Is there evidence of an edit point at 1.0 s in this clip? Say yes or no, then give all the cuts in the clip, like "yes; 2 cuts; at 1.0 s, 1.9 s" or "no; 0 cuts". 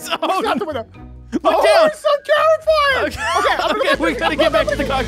no; 0 cuts